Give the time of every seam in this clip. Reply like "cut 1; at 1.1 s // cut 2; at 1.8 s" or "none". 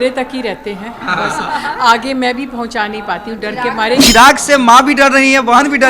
cut 1; at 4.0 s